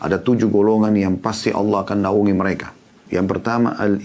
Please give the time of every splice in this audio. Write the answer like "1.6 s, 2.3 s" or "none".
3.0 s